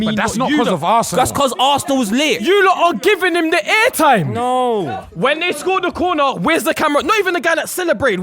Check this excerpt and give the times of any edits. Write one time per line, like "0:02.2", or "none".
0:01.1
0:02.5
0:04.8